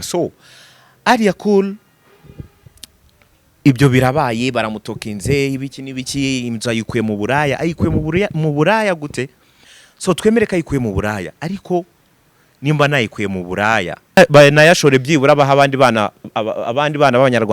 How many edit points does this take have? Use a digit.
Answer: 1